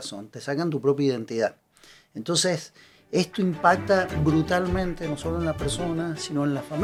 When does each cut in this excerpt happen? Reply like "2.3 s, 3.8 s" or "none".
none